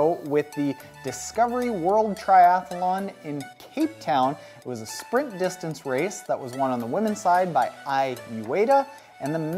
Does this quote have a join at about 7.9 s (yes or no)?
yes